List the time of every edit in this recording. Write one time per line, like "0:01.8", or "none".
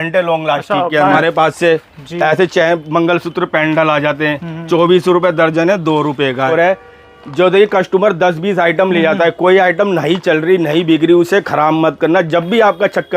0:01.2
0:06.5